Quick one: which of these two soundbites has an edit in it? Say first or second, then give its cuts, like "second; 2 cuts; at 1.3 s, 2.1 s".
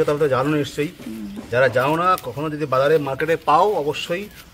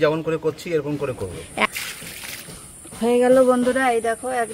second; 1 cut; at 1.6 s